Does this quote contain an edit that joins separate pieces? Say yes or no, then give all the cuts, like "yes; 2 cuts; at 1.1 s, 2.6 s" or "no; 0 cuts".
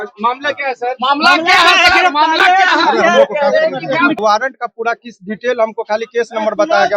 yes; 1 cut; at 4.2 s